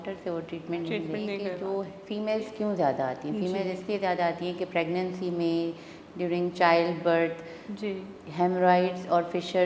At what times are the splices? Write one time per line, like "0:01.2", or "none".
0:01.5